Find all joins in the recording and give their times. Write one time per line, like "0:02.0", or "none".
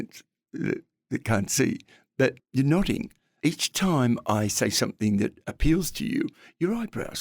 0:02.4
0:03.2